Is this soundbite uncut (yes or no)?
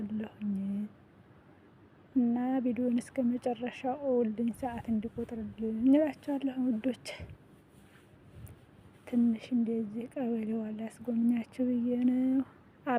yes